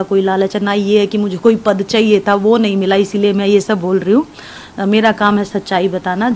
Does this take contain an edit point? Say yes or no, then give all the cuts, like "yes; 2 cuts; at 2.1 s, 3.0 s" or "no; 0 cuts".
no; 0 cuts